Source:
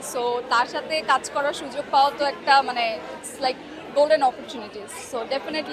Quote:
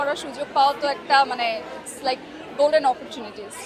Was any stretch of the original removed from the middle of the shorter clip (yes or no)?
no